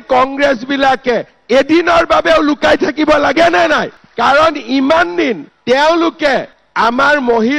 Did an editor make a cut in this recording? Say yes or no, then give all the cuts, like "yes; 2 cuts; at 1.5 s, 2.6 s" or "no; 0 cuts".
no; 0 cuts